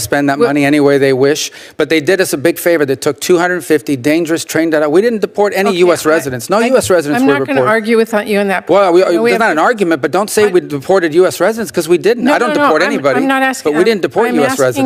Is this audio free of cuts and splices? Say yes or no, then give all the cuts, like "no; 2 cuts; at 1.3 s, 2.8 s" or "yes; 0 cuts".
yes; 0 cuts